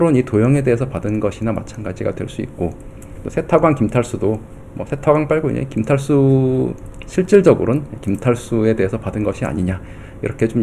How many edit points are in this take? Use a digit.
0